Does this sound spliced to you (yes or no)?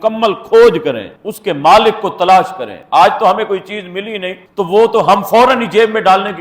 no